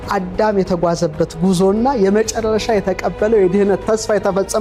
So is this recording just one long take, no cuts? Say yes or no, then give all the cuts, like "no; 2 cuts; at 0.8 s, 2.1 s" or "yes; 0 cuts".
yes; 0 cuts